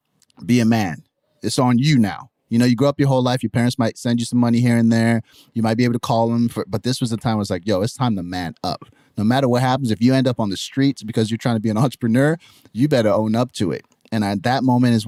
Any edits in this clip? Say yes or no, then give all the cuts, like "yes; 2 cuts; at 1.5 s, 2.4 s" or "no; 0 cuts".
no; 0 cuts